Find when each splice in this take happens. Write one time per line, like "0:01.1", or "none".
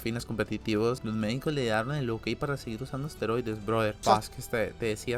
0:01.0
0:04.0